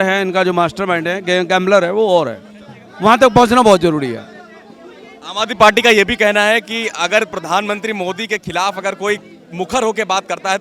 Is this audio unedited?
yes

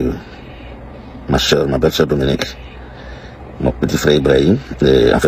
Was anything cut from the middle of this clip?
no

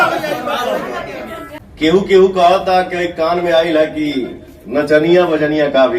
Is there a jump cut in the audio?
yes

